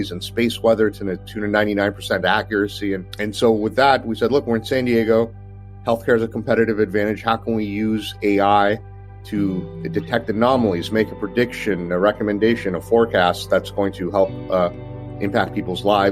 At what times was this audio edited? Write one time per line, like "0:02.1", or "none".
none